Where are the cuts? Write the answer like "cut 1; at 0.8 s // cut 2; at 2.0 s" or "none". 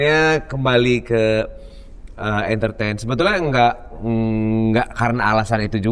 none

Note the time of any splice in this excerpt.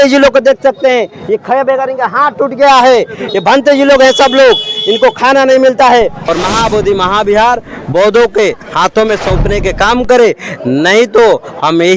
cut 1; at 6.2 s

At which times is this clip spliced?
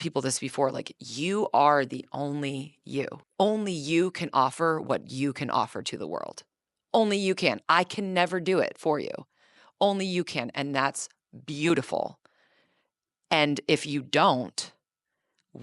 cut 1; at 3.2 s

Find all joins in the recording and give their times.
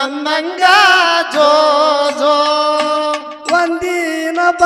none

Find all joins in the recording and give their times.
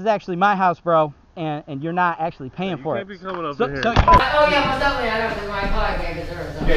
cut 1; at 4.2 s

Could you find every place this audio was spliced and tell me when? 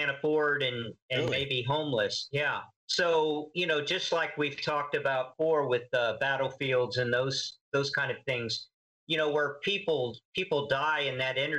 cut 1; at 2.8 s

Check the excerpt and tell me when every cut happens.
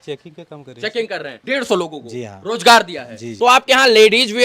cut 1; at 1.4 s // cut 2; at 3.2 s

